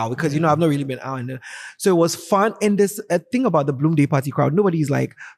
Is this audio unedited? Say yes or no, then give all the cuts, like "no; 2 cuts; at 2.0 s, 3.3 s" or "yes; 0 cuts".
yes; 0 cuts